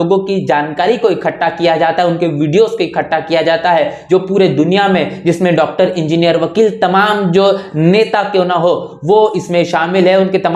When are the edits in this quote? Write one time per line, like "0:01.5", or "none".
none